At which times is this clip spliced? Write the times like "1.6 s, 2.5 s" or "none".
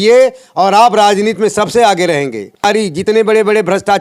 2.6 s